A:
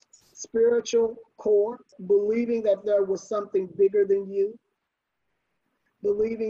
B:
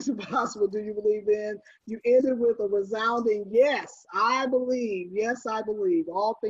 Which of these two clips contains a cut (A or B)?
A